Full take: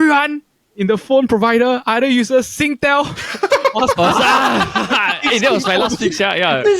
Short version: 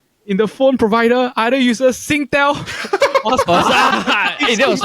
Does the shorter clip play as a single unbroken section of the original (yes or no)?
no